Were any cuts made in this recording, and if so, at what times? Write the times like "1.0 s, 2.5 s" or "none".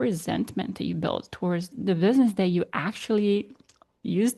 1.7 s